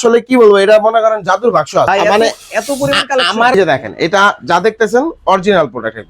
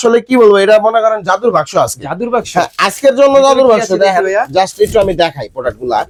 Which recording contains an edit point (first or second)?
first